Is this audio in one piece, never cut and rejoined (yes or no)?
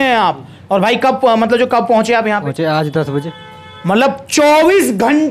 no